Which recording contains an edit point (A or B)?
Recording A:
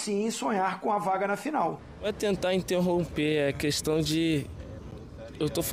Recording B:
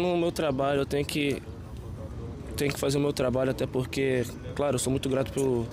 A